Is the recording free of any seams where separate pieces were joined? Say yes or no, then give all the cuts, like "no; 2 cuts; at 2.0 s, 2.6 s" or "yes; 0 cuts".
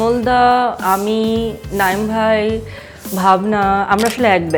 yes; 0 cuts